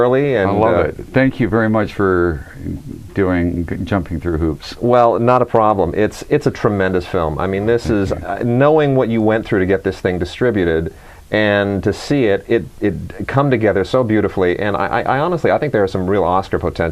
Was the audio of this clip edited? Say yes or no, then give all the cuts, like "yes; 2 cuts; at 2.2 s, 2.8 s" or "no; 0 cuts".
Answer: yes; 1 cut; at 4.9 s